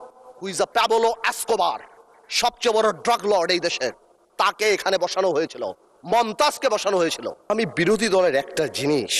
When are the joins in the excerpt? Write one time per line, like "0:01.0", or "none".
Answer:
0:07.5